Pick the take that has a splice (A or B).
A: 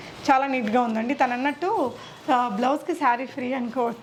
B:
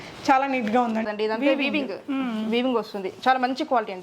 B